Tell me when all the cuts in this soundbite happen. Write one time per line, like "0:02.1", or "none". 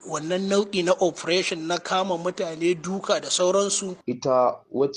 0:03.9